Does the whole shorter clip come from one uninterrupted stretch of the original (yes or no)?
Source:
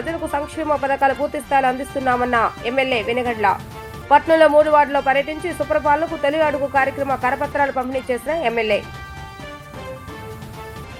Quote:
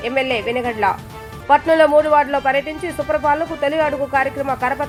yes